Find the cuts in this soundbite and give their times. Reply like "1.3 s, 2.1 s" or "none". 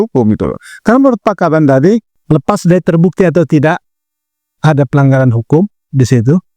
2.1 s